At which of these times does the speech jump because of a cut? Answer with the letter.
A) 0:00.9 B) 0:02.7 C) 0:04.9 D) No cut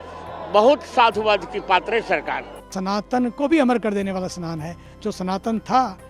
B